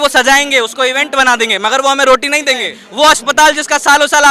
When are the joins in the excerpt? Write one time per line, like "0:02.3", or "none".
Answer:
0:02.8

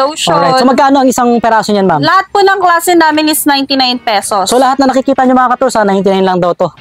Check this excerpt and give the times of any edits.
none

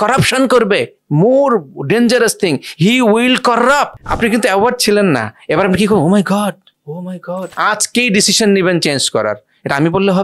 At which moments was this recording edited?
0:04.0
0:07.5

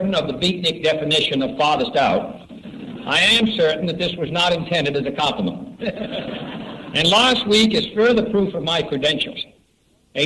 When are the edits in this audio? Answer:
0:03.0

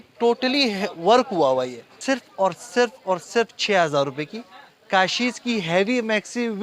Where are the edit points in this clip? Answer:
0:01.9

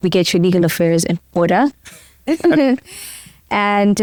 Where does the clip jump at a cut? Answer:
none

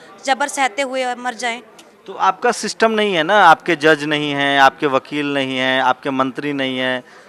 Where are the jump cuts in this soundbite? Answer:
none

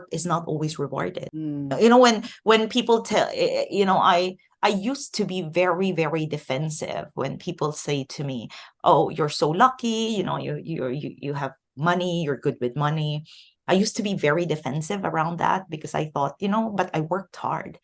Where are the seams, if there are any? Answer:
0:01.3

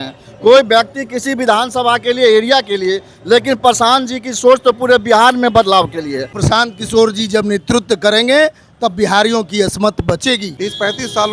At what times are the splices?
0:06.4
0:10.5

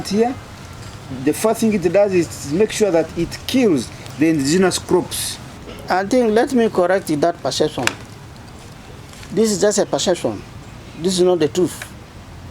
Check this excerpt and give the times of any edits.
0:05.7

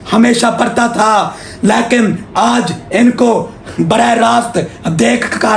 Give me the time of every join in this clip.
none

